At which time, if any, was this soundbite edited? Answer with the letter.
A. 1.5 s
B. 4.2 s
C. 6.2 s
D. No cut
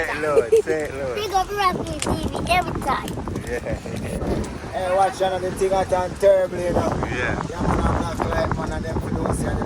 B